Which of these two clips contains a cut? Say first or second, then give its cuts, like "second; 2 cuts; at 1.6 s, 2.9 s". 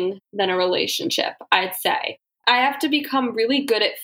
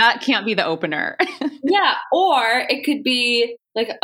first; 1 cut; at 2.4 s